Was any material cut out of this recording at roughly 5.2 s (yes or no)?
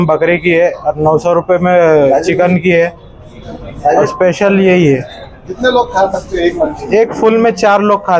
no